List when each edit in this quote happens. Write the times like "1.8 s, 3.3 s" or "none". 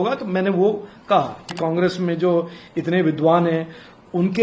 1.6 s